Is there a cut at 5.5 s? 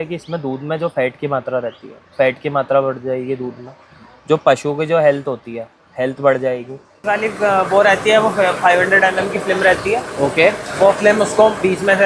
no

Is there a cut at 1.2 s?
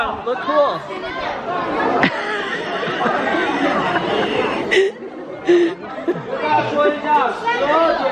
no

